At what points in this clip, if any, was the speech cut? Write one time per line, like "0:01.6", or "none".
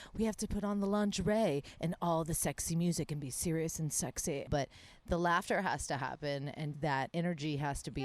0:04.5